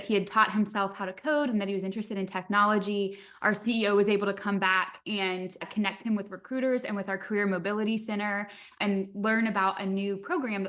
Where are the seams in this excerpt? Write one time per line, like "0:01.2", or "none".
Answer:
none